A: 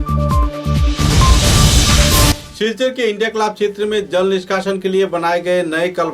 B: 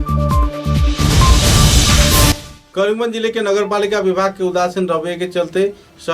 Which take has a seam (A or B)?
B